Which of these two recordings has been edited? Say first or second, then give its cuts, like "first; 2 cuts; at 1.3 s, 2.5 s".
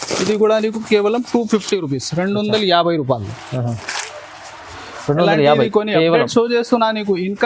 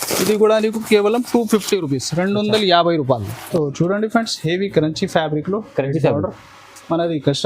second; 1 cut; at 3.3 s